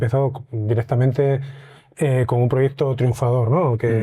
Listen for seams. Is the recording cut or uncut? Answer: uncut